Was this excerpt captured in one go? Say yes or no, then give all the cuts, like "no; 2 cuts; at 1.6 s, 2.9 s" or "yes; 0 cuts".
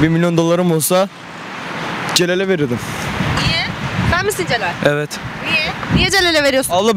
yes; 0 cuts